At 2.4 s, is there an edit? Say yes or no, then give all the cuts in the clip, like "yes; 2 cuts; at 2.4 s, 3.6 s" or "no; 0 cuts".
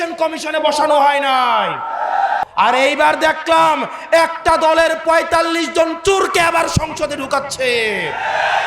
yes; 1 cut; at 2.4 s